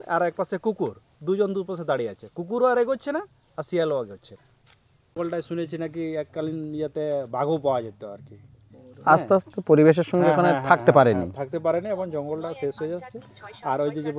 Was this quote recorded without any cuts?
no; 1 cut; at 5.2 s

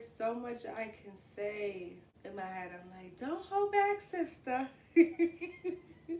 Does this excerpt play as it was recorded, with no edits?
no; 1 cut; at 2.1 s

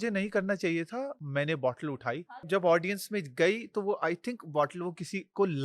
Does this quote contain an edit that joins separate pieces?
yes; 2 cuts; at 1.2 s, 2.2 s

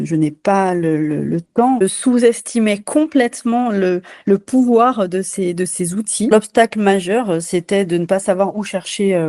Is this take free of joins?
no; 2 cuts; at 1.8 s, 6.3 s

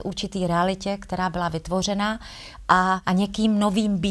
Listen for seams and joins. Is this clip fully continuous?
no; 1 cut; at 3.0 s

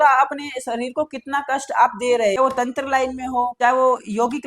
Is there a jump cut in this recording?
yes; 1 cut; at 2.3 s

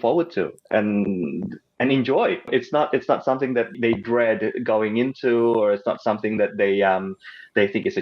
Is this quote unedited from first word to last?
no; 2 cuts; at 2.5 s, 3.7 s

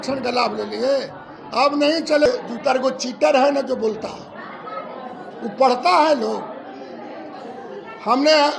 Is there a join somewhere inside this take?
yes; 1 cut; at 2.3 s

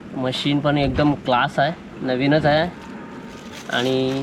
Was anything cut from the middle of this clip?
no; 0 cuts

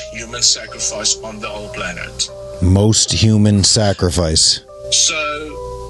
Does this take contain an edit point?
no; 0 cuts

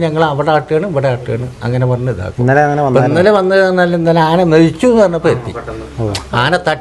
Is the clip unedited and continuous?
yes; 0 cuts

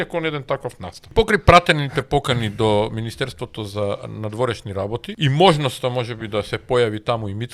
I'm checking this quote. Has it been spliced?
yes; 2 cuts; at 1.1 s, 5.1 s

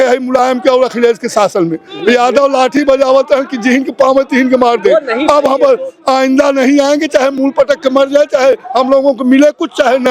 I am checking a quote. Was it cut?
no; 0 cuts

